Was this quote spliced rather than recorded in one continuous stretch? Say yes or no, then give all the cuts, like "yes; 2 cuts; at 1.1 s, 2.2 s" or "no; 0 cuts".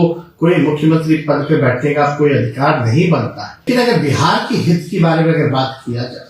yes; 1 cut; at 3.7 s